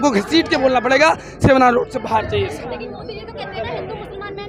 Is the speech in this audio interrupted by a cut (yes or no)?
no